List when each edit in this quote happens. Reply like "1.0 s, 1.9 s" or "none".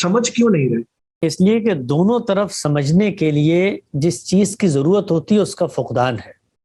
1.0 s